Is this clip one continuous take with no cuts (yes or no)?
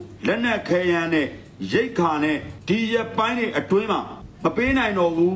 no